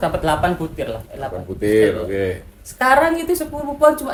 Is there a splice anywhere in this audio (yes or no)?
no